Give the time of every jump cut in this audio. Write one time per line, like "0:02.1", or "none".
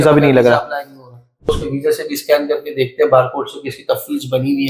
0:01.6